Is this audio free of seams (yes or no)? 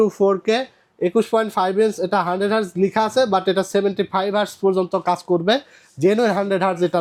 yes